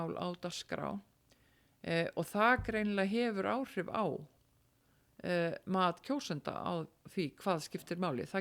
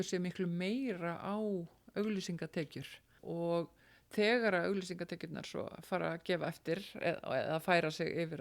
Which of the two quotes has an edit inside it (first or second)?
second